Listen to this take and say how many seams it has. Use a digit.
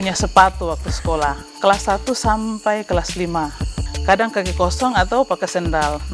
2